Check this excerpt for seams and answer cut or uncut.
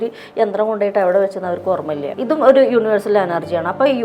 cut